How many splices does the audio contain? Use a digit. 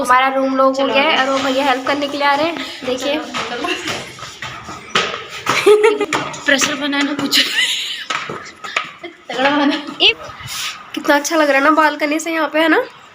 2